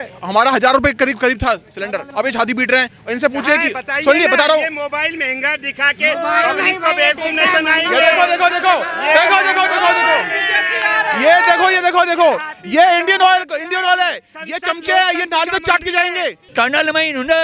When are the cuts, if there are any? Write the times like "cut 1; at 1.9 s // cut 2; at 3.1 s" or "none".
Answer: cut 1; at 2.0 s // cut 2; at 16.4 s

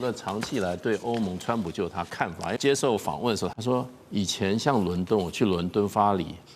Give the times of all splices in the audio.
cut 1; at 2.5 s // cut 2; at 3.5 s

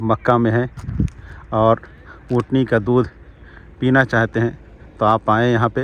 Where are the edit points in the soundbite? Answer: none

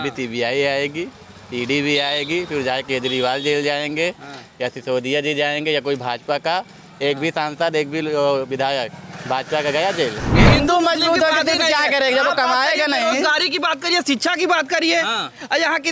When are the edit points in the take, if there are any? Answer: cut 1; at 10.3 s

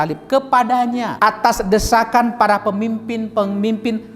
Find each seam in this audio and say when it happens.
cut 1; at 1.1 s

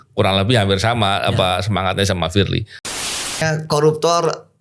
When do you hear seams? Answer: cut 1; at 3.3 s

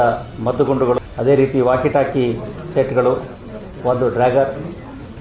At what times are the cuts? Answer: cut 1; at 1.0 s

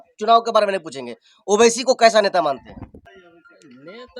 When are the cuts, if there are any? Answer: cut 1; at 3.1 s

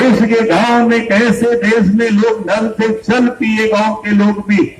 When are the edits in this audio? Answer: none

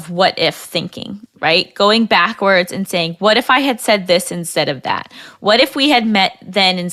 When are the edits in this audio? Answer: none

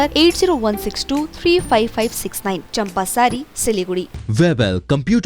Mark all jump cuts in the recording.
cut 1; at 4.1 s

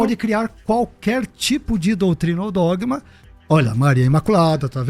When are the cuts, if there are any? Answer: none

